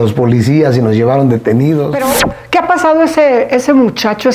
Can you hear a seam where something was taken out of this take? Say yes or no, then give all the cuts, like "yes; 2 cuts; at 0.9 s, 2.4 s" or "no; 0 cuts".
yes; 1 cut; at 1.9 s